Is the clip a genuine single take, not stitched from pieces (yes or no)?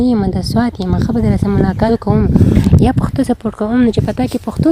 no